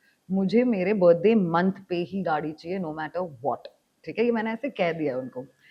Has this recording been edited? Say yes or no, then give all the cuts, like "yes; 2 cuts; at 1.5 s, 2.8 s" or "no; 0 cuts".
no; 0 cuts